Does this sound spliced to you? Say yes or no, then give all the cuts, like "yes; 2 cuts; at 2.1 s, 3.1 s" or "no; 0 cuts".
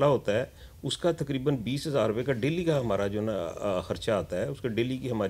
no; 0 cuts